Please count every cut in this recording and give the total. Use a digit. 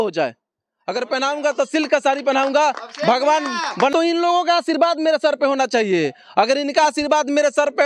1